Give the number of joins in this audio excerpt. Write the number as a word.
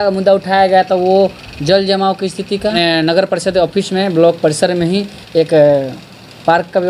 one